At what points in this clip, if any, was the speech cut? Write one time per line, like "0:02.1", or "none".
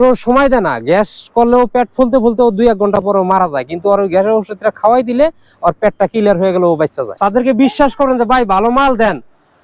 0:07.0